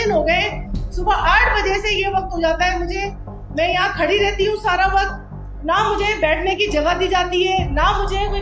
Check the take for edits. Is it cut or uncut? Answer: uncut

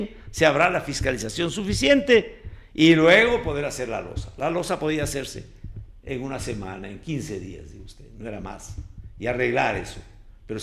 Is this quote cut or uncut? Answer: uncut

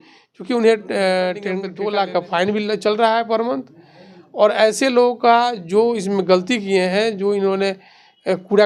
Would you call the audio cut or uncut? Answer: cut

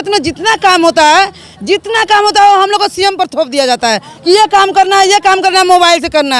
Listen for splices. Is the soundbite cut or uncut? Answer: uncut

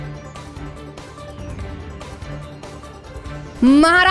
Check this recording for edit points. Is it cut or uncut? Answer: uncut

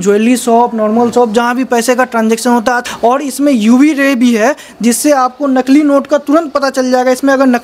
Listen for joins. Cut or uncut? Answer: cut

